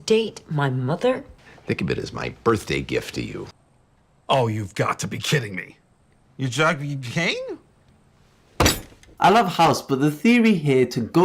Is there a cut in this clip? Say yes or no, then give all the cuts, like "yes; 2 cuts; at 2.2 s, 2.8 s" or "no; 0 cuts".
yes; 1 cut; at 9.1 s